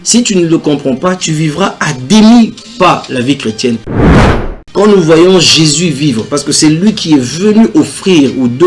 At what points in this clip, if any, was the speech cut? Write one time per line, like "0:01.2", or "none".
0:04.2